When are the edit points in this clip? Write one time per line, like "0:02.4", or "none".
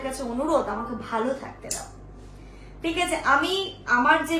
none